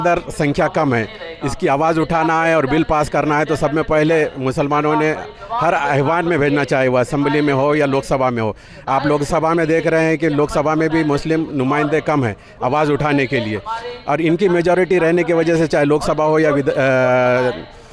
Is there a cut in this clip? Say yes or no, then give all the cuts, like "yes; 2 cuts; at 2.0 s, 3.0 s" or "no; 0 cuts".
no; 0 cuts